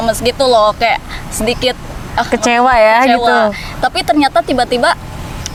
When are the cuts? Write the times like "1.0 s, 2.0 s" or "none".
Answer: none